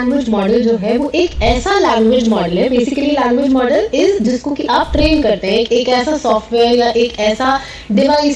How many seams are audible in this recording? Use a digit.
1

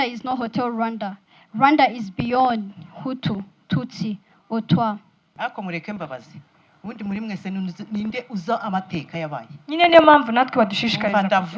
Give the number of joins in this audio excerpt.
1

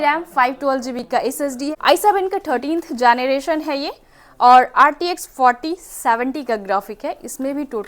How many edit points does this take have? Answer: 1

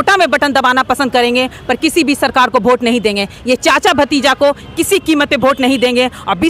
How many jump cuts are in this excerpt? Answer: 0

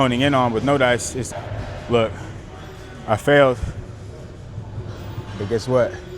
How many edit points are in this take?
1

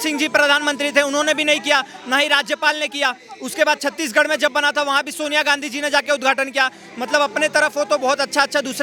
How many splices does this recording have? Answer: 0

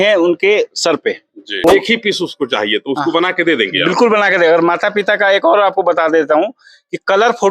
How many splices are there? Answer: 1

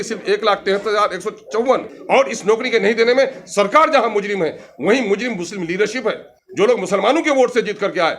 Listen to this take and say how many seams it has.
1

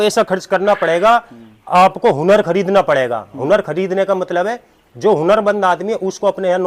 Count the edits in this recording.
0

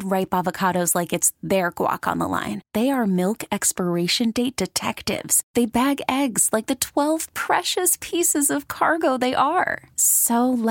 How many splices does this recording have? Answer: 0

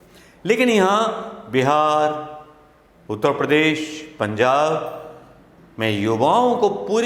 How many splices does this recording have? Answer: 0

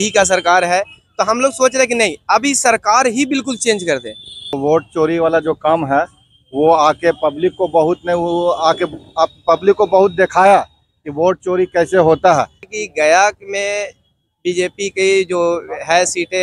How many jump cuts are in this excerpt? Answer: 2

